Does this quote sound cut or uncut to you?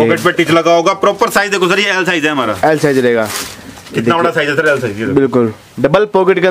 uncut